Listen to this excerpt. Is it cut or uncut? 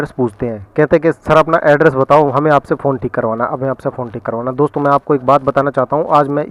uncut